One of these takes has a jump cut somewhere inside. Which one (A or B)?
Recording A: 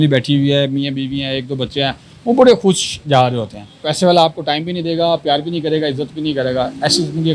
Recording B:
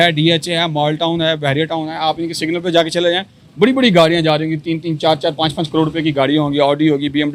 A